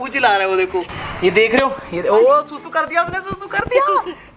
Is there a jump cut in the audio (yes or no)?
yes